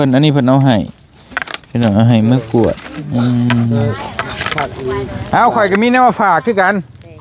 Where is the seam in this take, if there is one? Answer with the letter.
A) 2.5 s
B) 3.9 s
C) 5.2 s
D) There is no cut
C